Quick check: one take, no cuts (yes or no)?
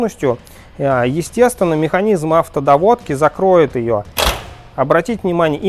yes